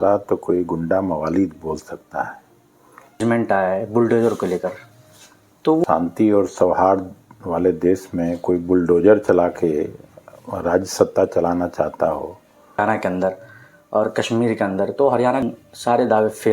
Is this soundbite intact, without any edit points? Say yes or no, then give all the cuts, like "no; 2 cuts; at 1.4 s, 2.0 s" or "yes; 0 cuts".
no; 4 cuts; at 3.2 s, 5.8 s, 12.8 s, 15.4 s